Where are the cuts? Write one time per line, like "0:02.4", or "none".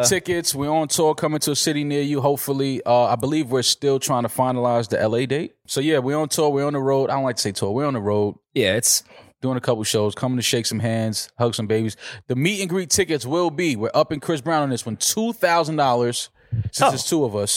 0:05.6

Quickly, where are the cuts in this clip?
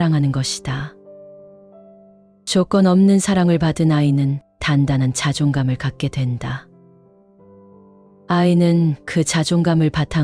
0:00.9
0:02.4
0:06.6
0:08.0

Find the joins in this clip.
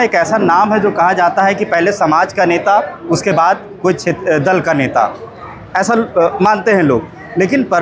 none

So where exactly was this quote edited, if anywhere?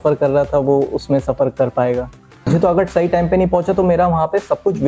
0:02.5

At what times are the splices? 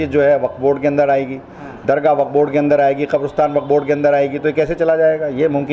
none

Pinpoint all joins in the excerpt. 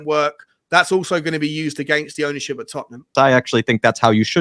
0:03.0

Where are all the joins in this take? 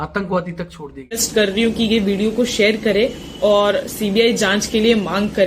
0:01.2

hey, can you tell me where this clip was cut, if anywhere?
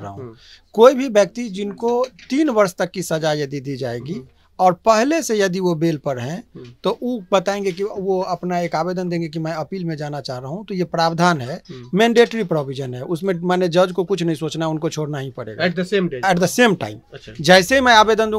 none

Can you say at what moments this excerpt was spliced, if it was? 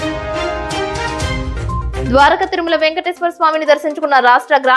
0:01.8

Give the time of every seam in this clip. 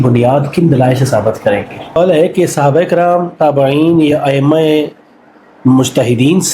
0:02.0

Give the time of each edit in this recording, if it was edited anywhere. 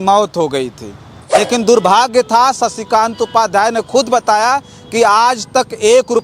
0:01.5

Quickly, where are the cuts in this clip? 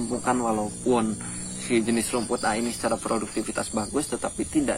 none

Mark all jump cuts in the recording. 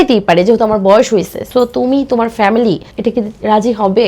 none

